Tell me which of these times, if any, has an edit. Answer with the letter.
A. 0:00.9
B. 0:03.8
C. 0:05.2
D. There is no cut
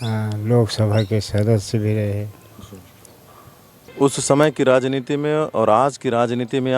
B